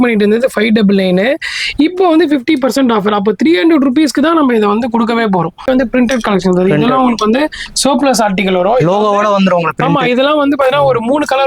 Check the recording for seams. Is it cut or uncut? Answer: cut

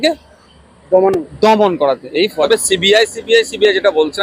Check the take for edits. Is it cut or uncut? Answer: cut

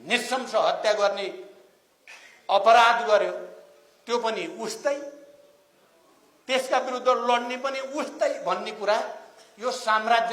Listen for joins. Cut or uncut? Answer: uncut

